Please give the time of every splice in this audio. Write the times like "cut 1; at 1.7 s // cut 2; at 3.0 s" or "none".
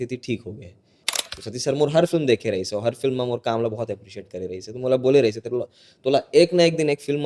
cut 1; at 1.1 s